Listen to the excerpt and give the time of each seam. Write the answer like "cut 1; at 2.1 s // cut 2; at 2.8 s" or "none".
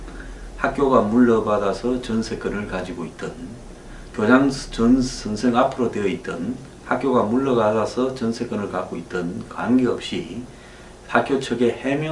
cut 1; at 8.4 s